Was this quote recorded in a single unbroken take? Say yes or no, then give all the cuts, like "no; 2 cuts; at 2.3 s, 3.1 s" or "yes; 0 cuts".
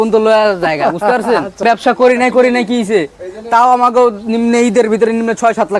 no; 1 cut; at 1.6 s